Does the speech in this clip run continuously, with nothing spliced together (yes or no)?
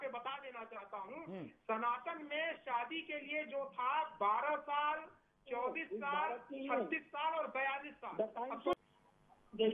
no